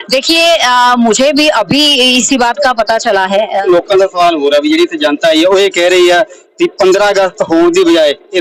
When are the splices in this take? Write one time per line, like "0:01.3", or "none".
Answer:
0:03.6